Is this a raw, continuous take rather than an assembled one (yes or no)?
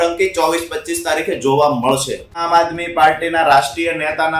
no